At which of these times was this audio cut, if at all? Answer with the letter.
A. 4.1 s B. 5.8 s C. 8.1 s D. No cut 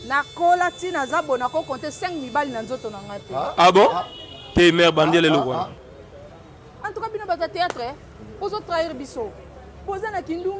B